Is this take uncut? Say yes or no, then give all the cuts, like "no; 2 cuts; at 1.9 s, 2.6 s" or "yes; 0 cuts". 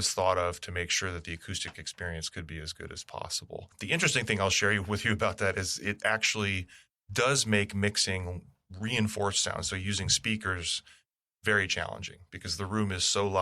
no; 1 cut; at 3.7 s